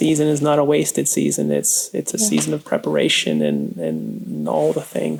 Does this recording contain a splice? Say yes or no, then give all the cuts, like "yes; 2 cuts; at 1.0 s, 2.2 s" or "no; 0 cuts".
no; 0 cuts